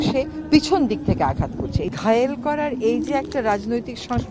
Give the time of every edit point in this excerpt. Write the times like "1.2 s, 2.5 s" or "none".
1.8 s